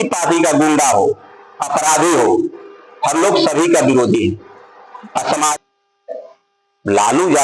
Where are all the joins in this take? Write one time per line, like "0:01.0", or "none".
0:05.5